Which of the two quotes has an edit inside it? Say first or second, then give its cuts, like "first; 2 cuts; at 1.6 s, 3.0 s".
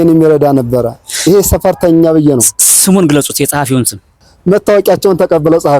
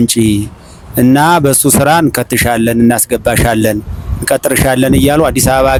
first; 1 cut; at 4.3 s